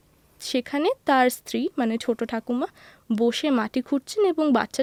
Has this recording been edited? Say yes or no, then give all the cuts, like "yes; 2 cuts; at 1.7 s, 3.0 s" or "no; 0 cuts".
no; 0 cuts